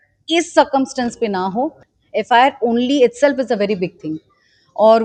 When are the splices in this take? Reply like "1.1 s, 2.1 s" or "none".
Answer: 1.8 s